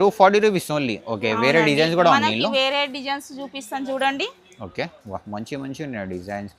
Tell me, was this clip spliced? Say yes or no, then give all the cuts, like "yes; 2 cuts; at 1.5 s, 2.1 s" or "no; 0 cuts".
no; 0 cuts